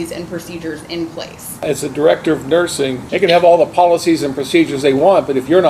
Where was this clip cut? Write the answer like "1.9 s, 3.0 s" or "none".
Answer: 1.6 s, 3.0 s